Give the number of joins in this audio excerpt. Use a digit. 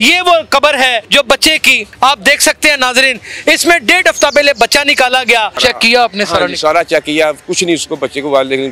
3